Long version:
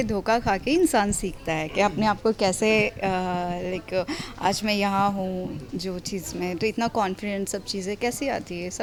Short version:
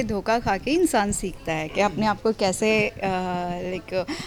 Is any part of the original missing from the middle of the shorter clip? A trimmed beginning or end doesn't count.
no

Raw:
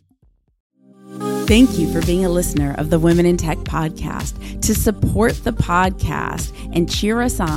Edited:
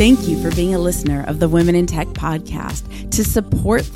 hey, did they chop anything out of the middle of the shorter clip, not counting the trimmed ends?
no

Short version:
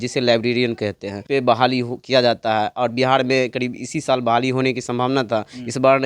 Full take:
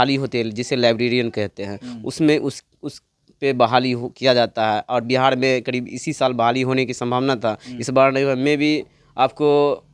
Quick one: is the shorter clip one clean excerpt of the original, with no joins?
no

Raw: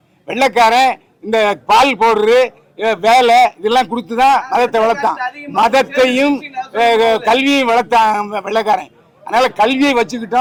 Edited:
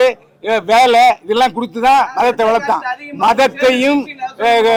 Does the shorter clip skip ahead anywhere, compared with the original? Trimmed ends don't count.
no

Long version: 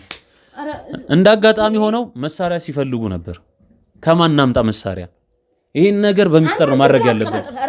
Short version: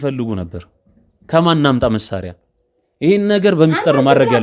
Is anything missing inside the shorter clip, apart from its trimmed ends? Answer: no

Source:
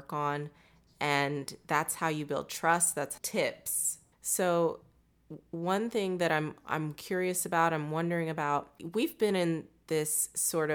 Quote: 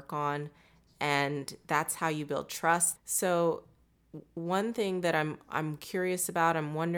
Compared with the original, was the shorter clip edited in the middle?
yes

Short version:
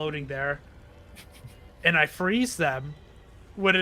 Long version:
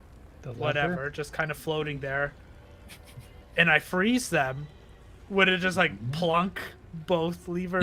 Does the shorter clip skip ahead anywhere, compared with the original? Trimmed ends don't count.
no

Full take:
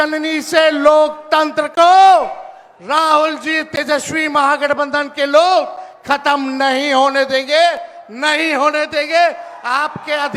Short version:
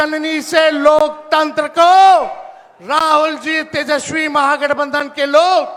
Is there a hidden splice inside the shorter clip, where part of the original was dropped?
no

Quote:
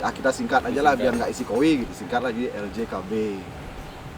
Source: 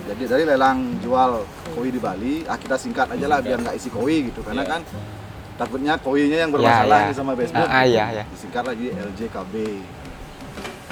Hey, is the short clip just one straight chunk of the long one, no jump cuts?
no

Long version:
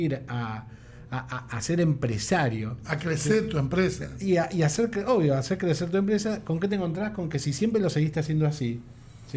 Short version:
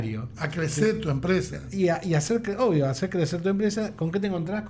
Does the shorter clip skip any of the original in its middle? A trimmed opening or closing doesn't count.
no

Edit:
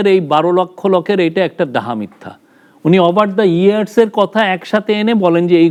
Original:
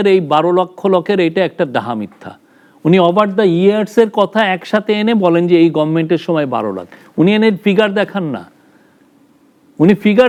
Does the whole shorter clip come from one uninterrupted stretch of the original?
yes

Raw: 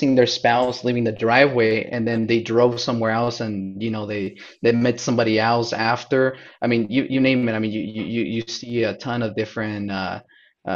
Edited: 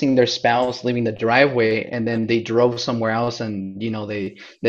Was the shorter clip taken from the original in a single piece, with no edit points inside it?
yes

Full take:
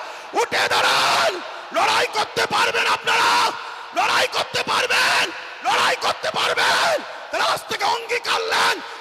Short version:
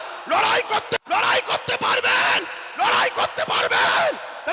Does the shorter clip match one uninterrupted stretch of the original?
no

